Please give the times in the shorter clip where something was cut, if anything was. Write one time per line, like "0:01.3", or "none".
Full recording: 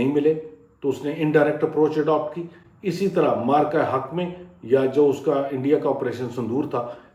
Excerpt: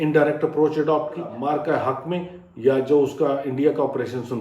0:01.3